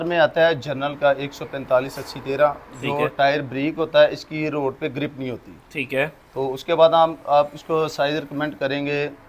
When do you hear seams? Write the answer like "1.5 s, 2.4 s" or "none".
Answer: none